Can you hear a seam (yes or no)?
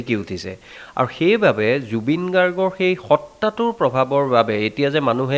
no